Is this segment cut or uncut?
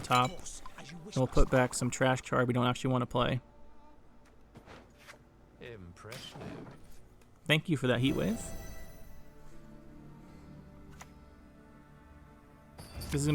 uncut